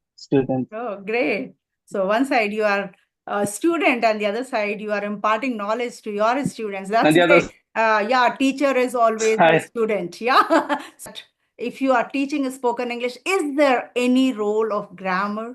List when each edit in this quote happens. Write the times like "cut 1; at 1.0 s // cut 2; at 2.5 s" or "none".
cut 1; at 11.1 s